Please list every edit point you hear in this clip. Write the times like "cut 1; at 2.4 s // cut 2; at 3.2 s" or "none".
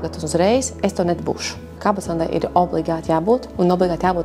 cut 1; at 1.8 s